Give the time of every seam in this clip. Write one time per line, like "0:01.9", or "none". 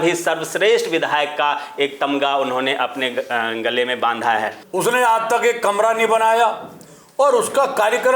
0:04.6